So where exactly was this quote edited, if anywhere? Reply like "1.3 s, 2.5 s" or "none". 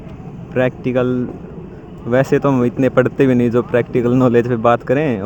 none